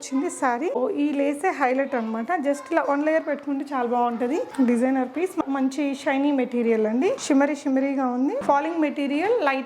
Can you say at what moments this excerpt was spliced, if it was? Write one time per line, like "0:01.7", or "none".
0:00.8
0:04.5
0:05.4
0:07.2
0:08.4